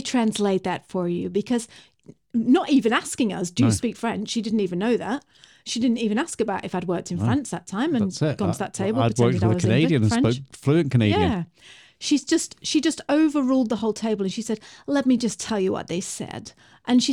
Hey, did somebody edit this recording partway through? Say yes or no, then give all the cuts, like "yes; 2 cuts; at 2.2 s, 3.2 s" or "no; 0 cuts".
no; 0 cuts